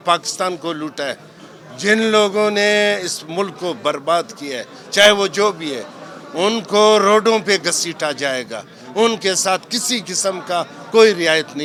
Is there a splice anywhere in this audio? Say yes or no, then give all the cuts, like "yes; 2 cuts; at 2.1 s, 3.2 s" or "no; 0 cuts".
no; 0 cuts